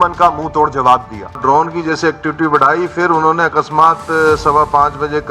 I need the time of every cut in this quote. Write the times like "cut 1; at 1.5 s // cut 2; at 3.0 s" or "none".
cut 1; at 1.4 s